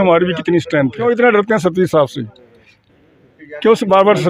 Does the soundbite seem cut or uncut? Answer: cut